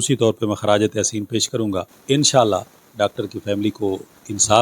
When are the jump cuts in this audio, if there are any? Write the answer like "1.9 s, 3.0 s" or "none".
1.9 s